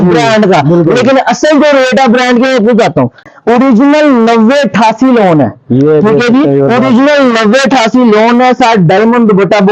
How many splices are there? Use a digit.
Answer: 1